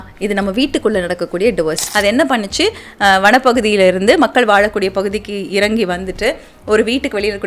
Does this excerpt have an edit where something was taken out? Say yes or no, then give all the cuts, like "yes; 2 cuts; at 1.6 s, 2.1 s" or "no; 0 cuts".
yes; 1 cut; at 1.8 s